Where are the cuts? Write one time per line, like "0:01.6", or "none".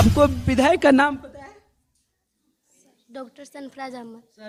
none

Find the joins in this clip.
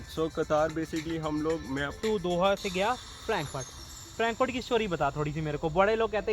0:01.9

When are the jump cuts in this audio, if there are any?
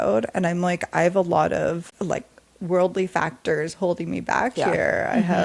0:01.9

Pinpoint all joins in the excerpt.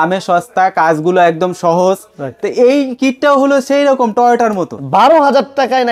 0:04.8

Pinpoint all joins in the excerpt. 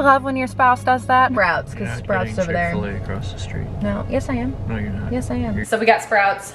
0:01.3
0:05.6

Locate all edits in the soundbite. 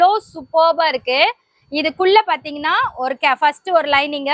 none

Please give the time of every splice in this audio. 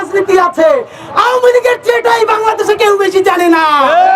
none

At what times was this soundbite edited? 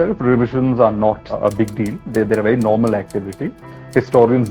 0:01.3

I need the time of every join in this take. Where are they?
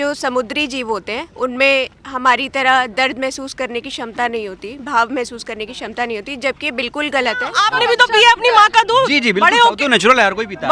0:07.6

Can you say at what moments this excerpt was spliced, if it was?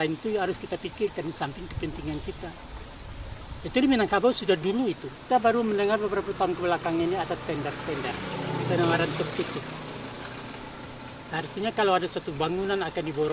0:05.1

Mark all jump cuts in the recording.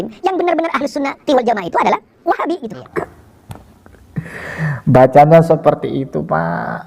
0:02.8

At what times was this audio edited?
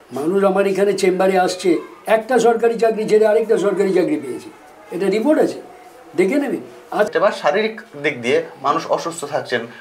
0:07.1

